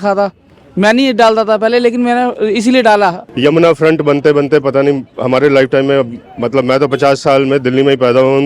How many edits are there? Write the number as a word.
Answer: one